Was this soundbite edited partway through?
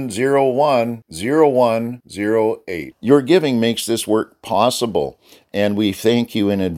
no; 0 cuts

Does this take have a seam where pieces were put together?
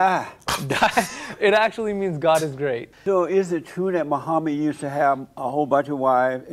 yes; 1 cut; at 2.9 s

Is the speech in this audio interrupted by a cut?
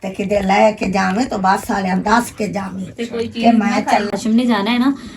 yes; 1 cut; at 4.1 s

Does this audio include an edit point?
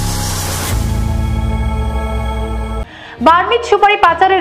yes; 1 cut; at 2.8 s

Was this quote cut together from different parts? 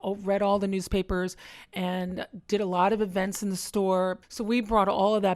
yes; 1 cut; at 4.3 s

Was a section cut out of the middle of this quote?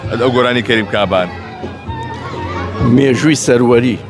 no; 0 cuts

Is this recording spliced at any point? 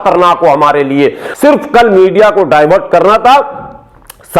yes; 1 cut; at 1.2 s

